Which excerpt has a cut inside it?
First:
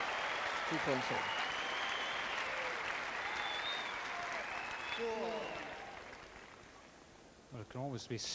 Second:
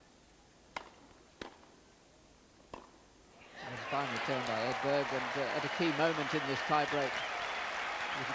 second; 1 cut; at 3.1 s

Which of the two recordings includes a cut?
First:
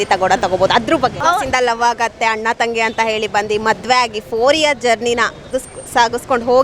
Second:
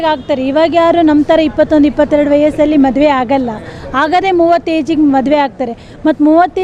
first; 1 cut; at 1.2 s

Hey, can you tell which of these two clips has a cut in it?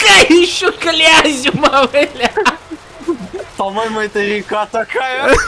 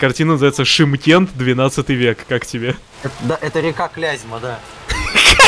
second; 1 cut; at 2.9 s

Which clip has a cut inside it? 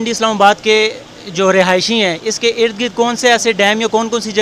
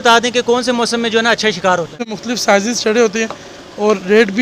second; 1 cut; at 2.1 s

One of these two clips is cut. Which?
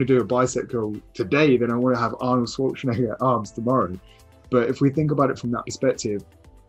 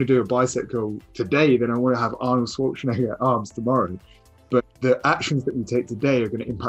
second; 1 cut; at 4.6 s

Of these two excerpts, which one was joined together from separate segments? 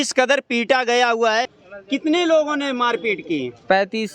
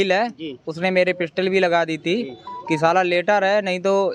first; 1 cut; at 1.6 s

